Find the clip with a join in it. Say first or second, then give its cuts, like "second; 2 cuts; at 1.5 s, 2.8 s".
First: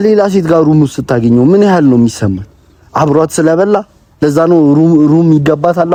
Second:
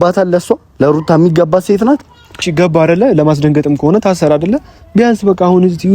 second; 1 cut; at 2.5 s